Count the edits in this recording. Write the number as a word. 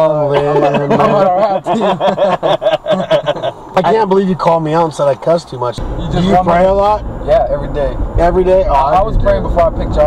two